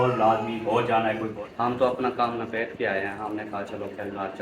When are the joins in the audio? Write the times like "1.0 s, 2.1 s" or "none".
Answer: 1.4 s